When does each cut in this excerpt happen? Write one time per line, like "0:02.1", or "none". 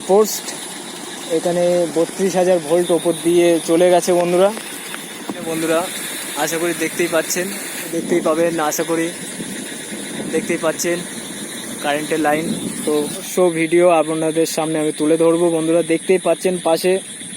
0:05.4
0:07.9
0:13.3